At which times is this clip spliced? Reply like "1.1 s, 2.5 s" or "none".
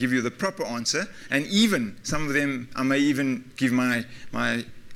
1.8 s